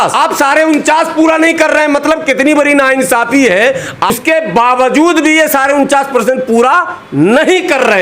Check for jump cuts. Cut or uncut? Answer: cut